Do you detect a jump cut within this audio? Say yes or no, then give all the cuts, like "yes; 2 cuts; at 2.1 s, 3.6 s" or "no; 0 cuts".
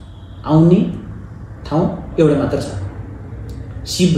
no; 0 cuts